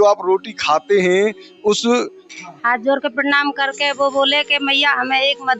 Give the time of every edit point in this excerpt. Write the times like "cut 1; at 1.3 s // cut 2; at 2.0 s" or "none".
cut 1; at 2.2 s